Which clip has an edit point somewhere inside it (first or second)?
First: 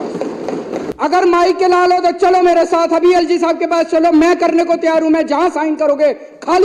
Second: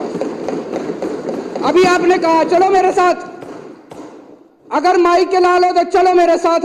first